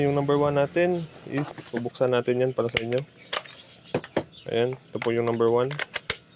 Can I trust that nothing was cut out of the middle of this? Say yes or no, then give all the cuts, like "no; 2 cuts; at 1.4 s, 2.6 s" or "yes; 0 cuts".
no; 1 cut; at 1.4 s